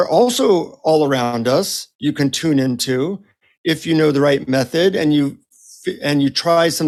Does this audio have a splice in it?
no; 0 cuts

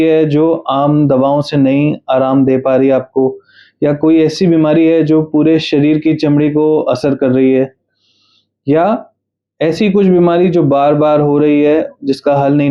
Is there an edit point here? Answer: no; 0 cuts

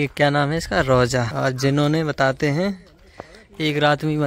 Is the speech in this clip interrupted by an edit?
yes; 1 cut; at 1.3 s

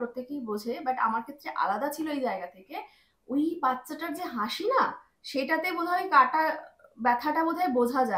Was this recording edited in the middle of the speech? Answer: no; 0 cuts

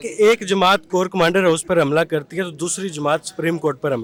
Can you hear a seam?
no; 0 cuts

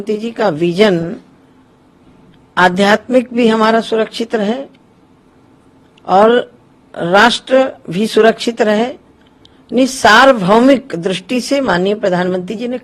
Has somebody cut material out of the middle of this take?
no; 0 cuts

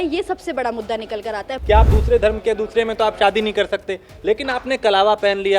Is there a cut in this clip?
yes; 1 cut; at 1.5 s

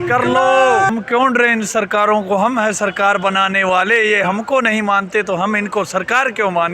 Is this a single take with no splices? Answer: no; 1 cut; at 0.9 s

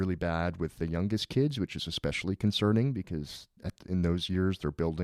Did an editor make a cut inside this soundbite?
no; 0 cuts

